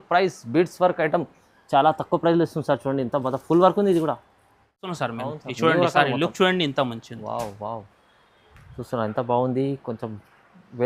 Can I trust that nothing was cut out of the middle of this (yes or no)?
no